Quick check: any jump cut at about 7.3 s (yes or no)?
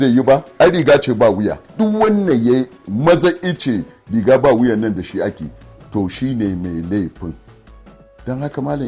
no